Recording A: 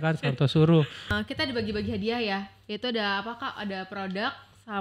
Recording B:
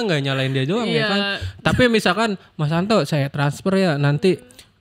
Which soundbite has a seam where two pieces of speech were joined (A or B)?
A